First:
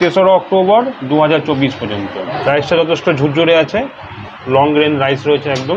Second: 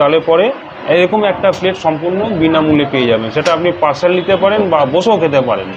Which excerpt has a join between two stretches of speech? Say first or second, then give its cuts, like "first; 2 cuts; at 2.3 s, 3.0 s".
first; 1 cut; at 2.3 s